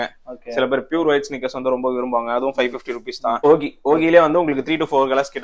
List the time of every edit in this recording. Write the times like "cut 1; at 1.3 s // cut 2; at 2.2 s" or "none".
cut 1; at 3.5 s